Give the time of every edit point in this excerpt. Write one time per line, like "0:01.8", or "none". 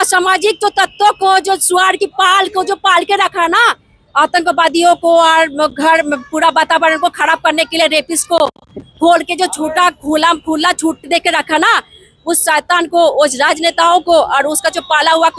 none